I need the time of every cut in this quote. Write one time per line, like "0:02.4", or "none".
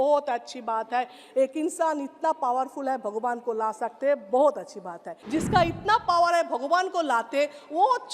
0:05.1